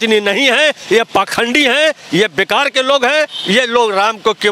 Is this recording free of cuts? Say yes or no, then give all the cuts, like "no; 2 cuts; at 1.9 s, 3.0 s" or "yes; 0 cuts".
yes; 0 cuts